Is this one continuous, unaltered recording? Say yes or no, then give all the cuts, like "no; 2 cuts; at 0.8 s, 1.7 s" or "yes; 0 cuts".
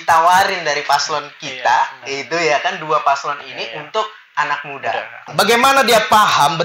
no; 1 cut; at 5.2 s